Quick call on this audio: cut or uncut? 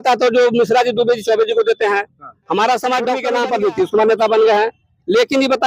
cut